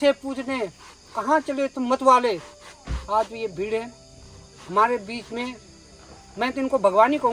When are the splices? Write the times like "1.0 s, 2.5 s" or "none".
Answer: none